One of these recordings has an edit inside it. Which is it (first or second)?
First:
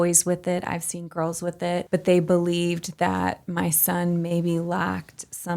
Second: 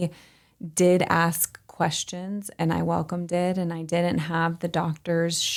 first